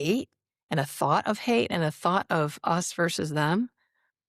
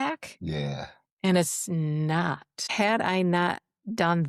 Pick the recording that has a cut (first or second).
second